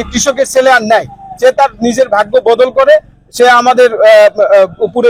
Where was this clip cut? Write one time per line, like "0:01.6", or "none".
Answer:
none